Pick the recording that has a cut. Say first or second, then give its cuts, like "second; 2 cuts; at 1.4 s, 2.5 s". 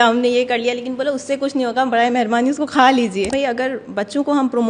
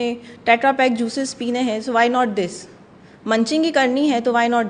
first; 1 cut; at 3.3 s